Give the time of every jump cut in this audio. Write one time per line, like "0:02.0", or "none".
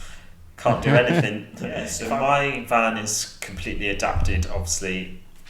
0:02.0